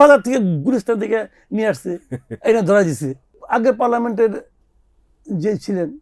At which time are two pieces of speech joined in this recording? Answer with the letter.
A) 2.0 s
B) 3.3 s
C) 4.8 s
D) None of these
B